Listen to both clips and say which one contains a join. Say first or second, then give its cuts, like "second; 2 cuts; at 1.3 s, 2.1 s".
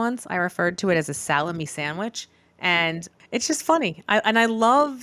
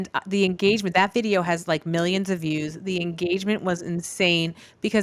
first; 1 cut; at 3.1 s